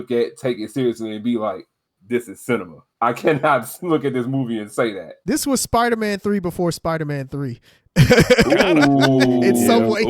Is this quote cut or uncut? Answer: cut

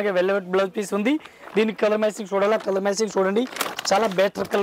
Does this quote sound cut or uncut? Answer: uncut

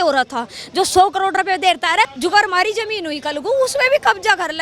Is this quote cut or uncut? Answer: cut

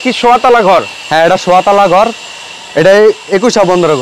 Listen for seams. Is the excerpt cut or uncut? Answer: uncut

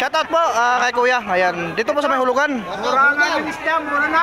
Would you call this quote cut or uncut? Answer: uncut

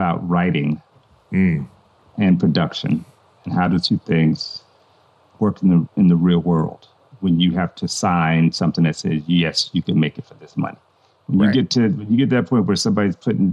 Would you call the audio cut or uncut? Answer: uncut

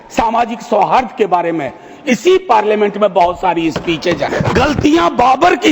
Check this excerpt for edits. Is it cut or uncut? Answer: cut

